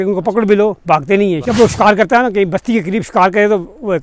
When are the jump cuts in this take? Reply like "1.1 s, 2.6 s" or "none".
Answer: 1.4 s